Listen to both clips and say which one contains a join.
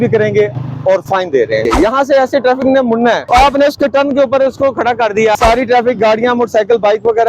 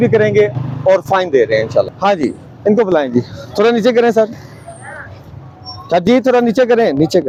first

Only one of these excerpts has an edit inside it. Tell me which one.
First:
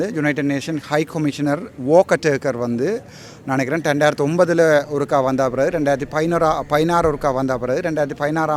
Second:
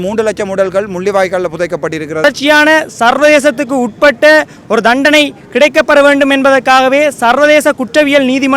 second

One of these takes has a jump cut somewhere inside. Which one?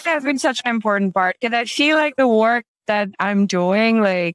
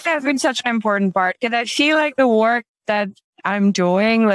first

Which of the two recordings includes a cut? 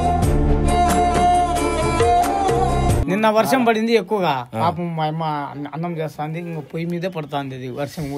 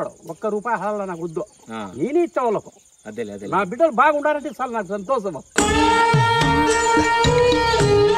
first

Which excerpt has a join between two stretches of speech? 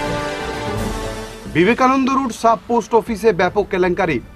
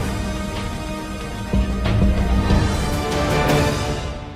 first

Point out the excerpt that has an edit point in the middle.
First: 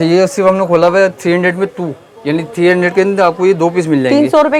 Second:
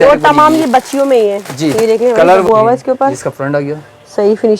second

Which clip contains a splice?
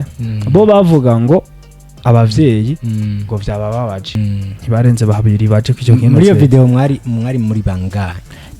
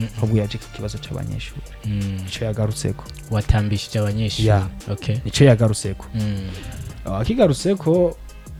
first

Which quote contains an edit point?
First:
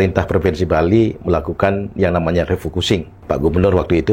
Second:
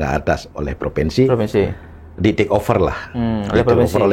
first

